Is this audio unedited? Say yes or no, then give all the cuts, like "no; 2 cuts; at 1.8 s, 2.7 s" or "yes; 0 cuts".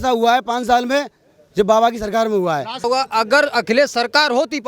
no; 1 cut; at 2.9 s